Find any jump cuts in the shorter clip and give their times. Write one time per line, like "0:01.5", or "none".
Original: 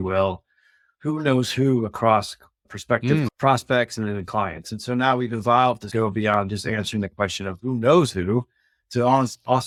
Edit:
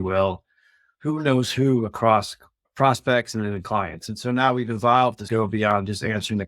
0:02.7

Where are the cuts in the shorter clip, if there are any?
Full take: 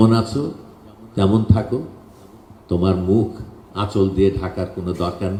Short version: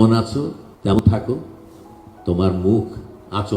0:01.0

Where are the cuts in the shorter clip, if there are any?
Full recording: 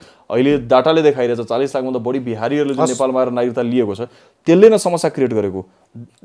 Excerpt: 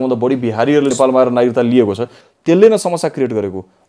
0:00.9

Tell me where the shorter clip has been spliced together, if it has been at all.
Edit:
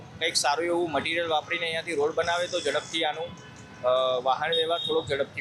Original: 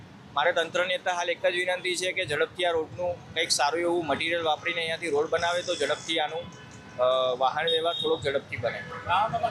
none

